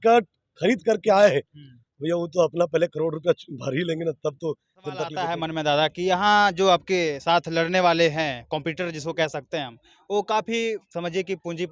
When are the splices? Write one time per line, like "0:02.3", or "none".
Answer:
0:05.2